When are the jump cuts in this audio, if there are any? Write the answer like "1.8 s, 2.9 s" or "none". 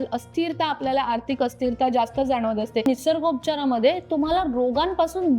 2.9 s